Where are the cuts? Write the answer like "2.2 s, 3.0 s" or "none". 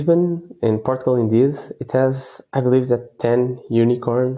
none